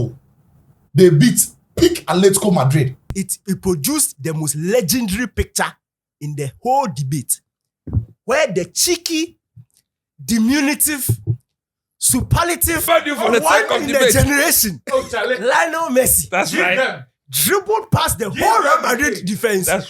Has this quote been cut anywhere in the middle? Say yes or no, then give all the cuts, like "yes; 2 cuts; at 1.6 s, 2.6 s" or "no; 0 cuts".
yes; 2 cuts; at 3.1 s, 12.9 s